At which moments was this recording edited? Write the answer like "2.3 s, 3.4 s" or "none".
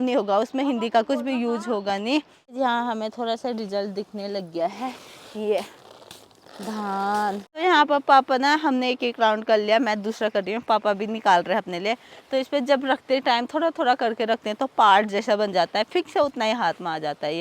2.4 s, 7.5 s